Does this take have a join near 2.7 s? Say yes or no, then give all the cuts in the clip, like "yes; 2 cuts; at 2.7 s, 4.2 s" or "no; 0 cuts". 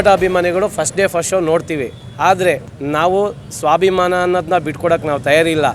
yes; 2 cuts; at 2.0 s, 2.7 s